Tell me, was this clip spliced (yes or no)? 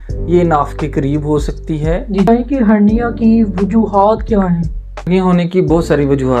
yes